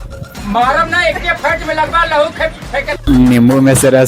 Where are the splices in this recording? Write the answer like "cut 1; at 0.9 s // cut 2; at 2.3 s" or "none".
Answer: cut 1; at 3.0 s